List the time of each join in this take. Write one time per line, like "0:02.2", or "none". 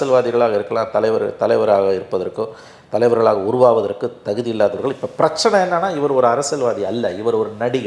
none